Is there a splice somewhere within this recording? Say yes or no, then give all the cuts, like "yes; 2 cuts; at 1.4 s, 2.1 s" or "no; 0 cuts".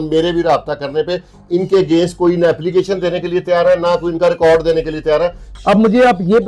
yes; 1 cut; at 5.5 s